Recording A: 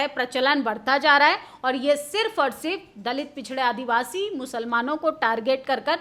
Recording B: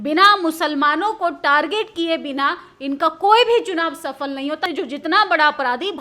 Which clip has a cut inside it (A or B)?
B